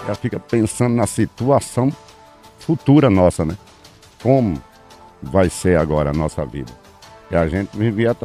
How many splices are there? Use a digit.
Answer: 0